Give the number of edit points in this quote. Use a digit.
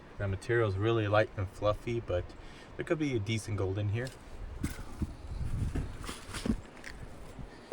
1